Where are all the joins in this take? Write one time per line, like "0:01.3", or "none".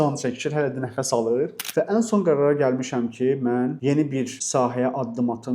0:01.7